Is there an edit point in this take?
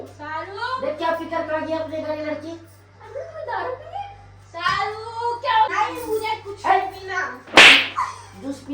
yes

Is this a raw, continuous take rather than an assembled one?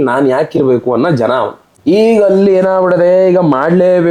yes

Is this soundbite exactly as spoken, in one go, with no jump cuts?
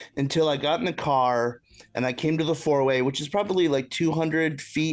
yes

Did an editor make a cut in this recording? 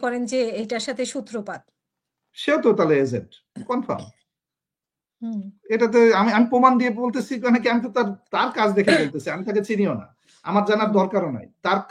no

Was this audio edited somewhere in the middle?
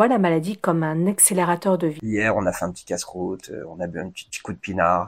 yes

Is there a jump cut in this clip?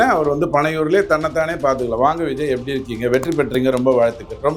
no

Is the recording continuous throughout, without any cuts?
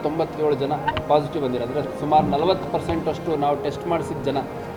yes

